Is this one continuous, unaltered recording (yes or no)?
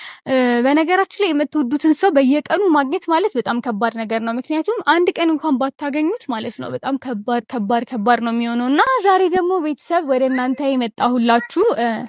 no